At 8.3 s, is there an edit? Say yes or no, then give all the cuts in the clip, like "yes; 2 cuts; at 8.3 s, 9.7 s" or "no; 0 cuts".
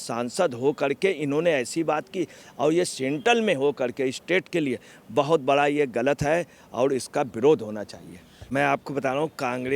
yes; 1 cut; at 8.3 s